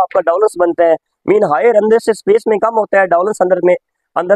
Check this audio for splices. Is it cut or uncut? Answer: uncut